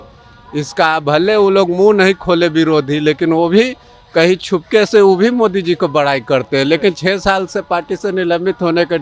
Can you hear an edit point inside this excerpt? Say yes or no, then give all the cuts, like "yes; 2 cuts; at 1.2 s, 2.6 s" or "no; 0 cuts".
no; 0 cuts